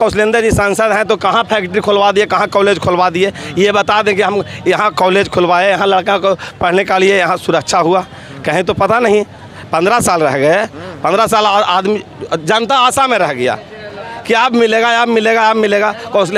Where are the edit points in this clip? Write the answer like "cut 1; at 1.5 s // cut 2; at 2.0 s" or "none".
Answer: none